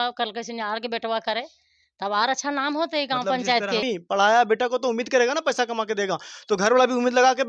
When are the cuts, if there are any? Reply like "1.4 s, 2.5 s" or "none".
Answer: 3.8 s